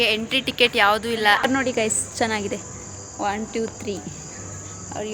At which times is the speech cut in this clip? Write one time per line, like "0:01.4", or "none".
0:01.4